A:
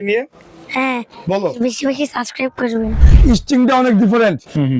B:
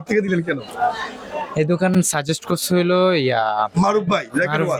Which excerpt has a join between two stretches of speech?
A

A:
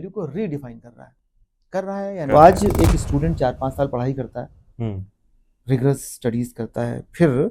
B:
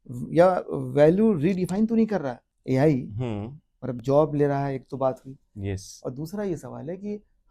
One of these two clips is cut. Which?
A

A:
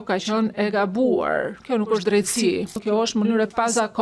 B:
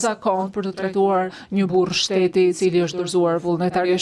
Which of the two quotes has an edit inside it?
A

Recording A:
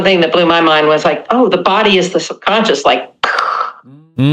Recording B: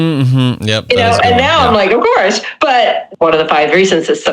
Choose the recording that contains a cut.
B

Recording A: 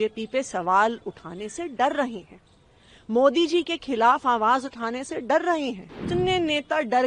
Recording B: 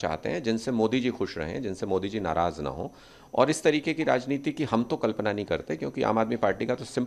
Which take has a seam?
A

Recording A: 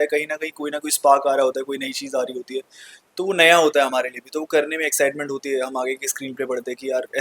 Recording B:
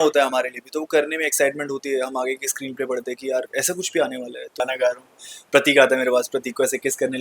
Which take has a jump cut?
B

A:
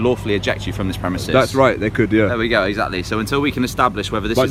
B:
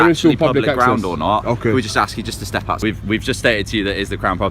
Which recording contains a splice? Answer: B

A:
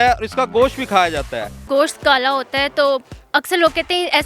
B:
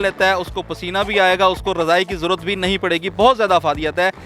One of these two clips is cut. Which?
A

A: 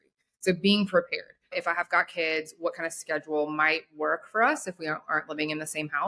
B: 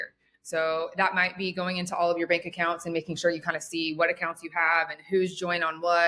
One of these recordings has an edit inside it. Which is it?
A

